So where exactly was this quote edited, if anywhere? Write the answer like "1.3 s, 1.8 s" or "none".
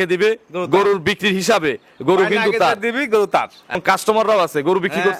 3.8 s